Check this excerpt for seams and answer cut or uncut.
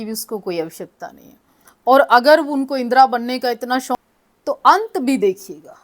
cut